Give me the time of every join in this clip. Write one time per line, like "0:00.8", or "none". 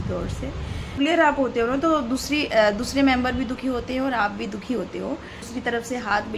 0:01.0
0:05.5

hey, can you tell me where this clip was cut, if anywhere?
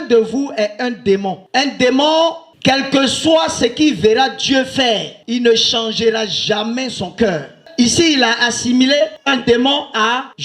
0:01.4

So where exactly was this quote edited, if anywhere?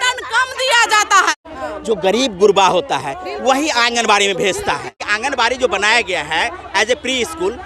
0:01.7
0:05.0

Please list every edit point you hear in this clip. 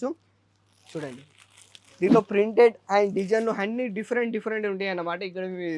none

